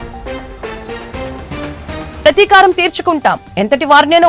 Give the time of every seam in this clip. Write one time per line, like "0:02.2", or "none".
0:02.1